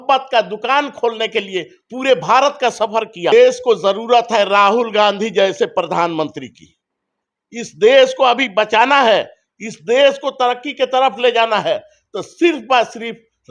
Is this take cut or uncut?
cut